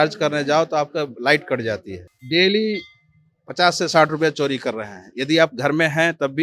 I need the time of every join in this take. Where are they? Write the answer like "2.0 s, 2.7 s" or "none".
2.1 s